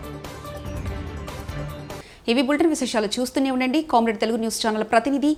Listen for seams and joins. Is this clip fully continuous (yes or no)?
yes